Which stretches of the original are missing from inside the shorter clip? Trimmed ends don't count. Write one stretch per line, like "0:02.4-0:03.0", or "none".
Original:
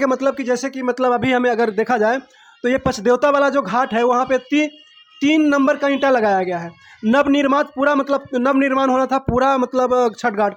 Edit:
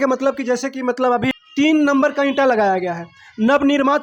0:01.3-0:05.0